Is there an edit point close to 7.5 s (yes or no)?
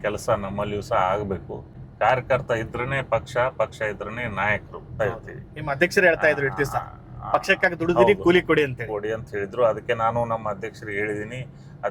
no